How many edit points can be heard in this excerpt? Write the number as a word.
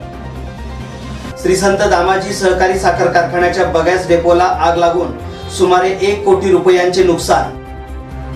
one